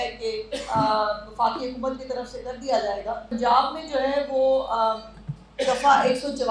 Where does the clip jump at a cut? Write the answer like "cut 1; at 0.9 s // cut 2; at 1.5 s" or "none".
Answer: cut 1; at 3.3 s